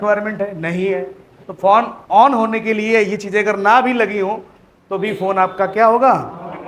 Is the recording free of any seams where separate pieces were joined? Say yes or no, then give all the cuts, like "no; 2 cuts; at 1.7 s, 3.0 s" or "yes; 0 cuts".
yes; 0 cuts